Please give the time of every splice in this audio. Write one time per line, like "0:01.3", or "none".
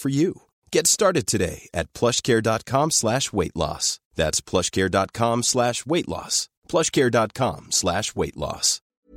none